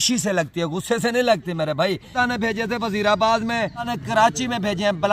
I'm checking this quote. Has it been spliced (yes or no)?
yes